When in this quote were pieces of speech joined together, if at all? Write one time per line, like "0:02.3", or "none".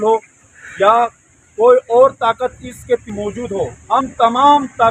none